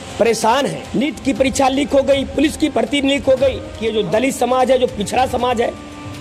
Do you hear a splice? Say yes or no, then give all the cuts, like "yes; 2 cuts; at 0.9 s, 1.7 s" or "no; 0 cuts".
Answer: yes; 2 cuts; at 0.9 s, 3.7 s